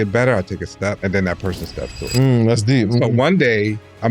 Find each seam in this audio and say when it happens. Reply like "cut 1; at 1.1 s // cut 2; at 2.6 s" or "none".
cut 1; at 1.0 s